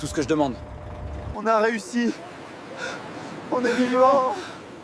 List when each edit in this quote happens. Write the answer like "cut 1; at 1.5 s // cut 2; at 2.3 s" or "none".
cut 1; at 1.3 s